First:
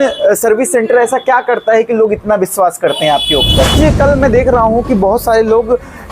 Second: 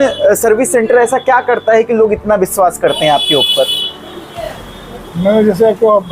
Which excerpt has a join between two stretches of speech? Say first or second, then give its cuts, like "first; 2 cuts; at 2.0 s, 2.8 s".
first; 1 cut; at 3.7 s